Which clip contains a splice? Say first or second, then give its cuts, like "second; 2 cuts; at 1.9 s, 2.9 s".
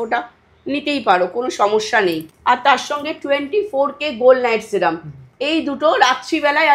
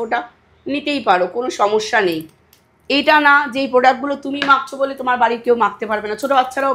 first; 1 cut; at 2.3 s